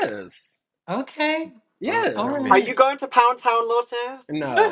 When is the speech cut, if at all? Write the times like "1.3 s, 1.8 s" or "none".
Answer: none